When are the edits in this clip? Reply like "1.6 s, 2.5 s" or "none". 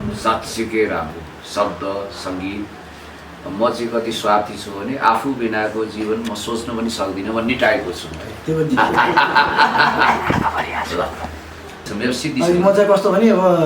11.9 s